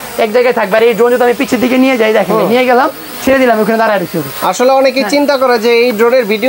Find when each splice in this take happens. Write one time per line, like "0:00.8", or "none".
none